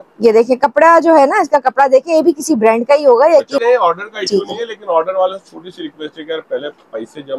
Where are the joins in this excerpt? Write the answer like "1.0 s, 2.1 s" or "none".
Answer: 3.6 s